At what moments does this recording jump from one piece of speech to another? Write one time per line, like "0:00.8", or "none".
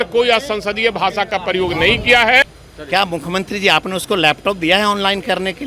0:02.4